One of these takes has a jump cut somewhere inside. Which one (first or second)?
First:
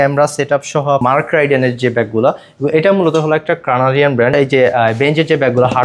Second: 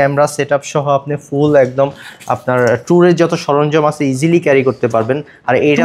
first